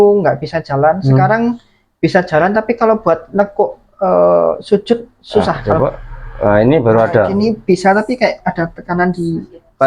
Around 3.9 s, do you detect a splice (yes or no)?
no